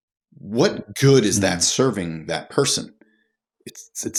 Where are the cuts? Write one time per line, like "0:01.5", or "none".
none